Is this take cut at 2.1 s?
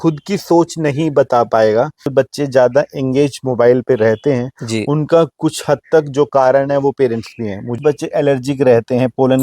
yes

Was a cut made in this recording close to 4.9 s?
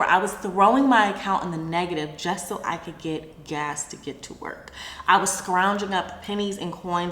no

